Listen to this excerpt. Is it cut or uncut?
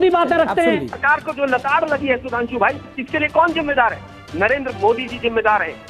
cut